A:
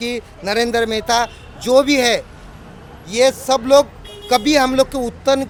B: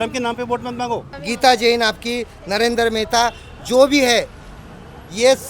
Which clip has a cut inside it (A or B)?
B